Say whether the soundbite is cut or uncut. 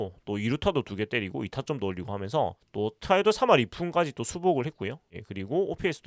uncut